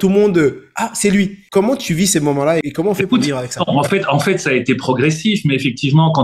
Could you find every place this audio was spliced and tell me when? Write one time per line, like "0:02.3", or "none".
0:01.4
0:02.7